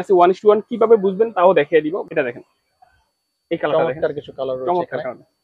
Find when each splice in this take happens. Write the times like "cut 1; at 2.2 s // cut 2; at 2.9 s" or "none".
cut 1; at 2.0 s